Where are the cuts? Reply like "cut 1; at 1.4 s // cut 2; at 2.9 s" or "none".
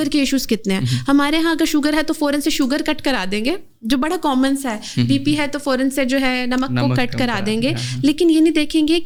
none